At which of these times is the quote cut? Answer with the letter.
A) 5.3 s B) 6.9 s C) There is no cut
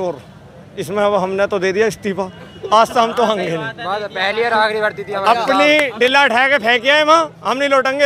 C